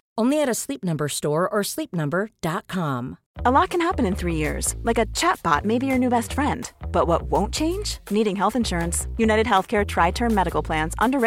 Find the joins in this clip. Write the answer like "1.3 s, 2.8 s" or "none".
3.2 s